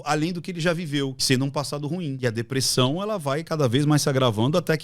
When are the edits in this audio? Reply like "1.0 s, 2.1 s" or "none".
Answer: 1.2 s, 2.2 s